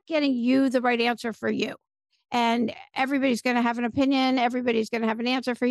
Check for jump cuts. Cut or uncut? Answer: uncut